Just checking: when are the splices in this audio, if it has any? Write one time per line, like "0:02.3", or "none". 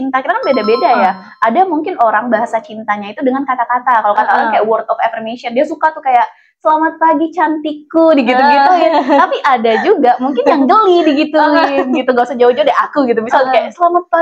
none